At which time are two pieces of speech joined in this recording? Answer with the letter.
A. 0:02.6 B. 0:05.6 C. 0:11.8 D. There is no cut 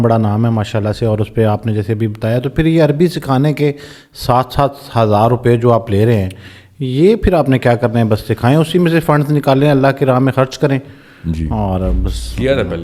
D